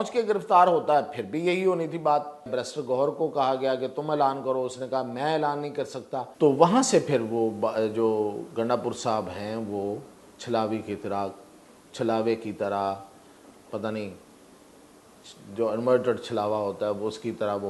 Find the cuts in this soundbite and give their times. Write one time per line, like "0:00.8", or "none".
0:02.5
0:06.3